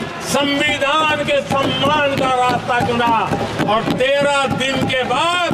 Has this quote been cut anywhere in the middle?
no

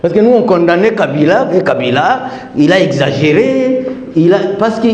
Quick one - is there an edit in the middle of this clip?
no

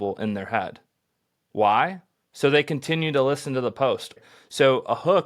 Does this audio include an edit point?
yes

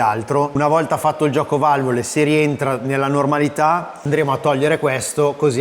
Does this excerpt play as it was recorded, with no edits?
no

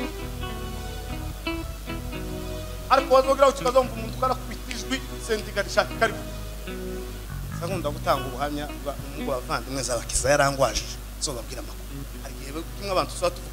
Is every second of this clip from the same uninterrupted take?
no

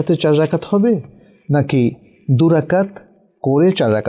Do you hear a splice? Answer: no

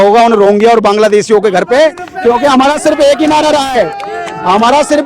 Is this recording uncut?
yes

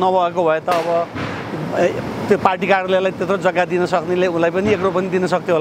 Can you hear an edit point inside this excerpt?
no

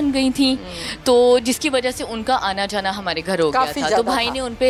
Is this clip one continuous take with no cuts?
yes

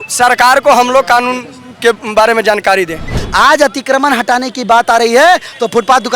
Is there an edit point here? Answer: yes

